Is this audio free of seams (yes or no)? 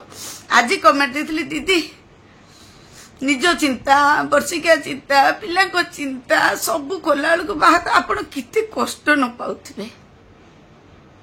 yes